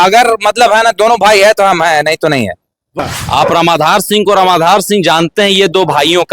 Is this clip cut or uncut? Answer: cut